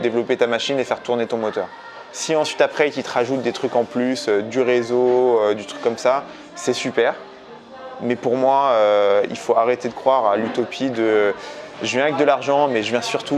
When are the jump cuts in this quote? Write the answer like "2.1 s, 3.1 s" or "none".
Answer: none

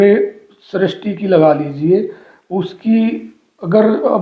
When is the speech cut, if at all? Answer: none

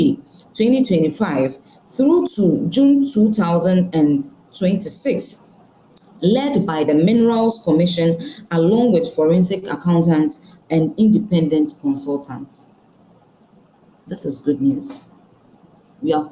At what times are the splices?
none

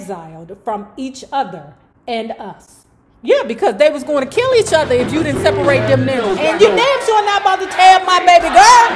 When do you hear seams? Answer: 6.4 s

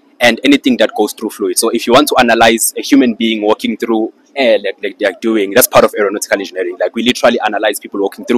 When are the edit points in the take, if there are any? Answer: none

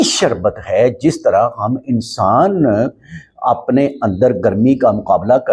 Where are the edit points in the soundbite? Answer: none

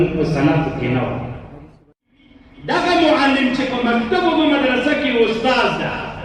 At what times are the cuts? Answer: 1.8 s

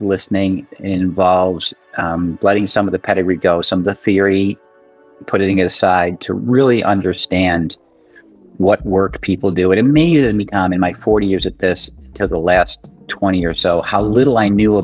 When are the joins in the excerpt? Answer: none

